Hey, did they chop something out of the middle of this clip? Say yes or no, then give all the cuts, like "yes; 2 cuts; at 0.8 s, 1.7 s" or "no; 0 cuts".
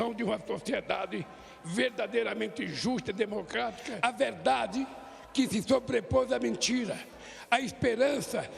yes; 1 cut; at 3.9 s